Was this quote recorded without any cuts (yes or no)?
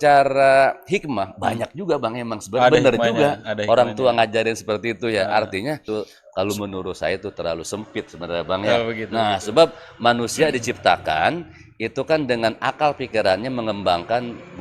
no